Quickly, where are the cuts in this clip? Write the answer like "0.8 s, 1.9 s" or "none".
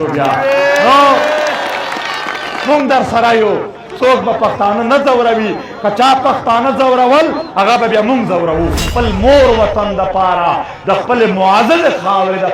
2.5 s, 3.8 s, 8.9 s